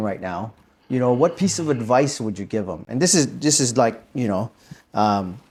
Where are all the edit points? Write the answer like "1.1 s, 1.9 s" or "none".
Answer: none